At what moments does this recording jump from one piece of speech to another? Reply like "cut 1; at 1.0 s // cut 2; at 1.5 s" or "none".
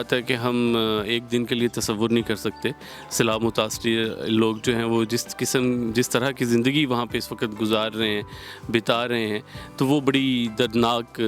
none